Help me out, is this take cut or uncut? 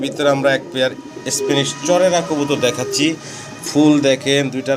uncut